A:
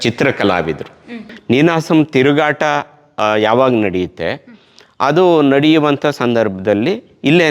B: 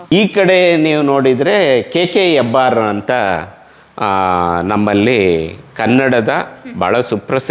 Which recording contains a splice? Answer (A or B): A